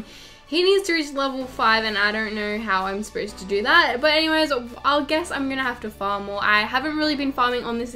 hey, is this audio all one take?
yes; 0 cuts

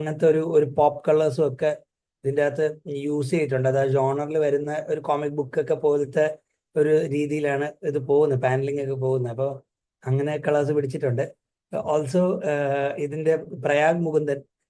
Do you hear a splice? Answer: no; 0 cuts

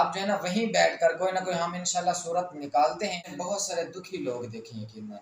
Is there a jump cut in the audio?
yes; 1 cut; at 3.3 s

